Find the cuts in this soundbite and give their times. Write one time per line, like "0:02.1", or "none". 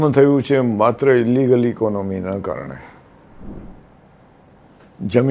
0:03.6